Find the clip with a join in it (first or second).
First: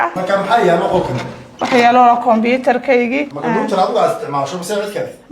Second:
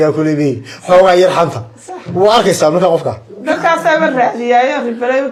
first